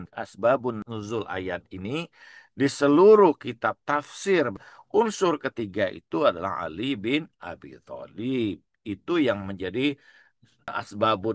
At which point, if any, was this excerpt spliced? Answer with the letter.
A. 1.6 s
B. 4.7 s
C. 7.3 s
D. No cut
B